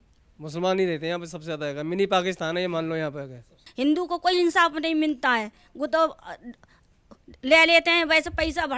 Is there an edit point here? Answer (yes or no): no